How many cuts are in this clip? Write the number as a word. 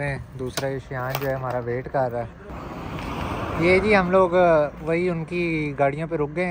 one